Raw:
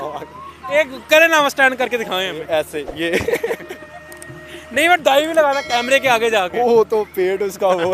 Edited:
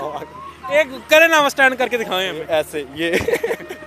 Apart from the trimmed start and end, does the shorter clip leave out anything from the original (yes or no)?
no